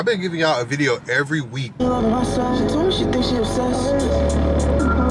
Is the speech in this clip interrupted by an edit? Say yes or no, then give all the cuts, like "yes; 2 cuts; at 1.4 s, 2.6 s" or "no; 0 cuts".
yes; 1 cut; at 1.8 s